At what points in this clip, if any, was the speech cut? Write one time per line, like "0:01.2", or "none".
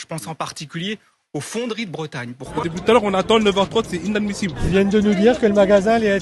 0:02.5